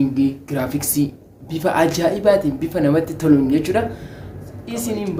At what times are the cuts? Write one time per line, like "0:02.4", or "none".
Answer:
none